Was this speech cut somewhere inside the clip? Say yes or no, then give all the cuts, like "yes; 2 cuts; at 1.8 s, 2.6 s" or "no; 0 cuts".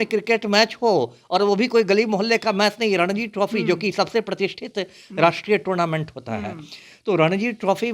no; 0 cuts